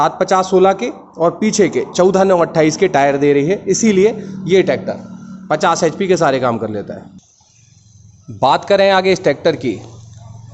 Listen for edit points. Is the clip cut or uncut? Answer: uncut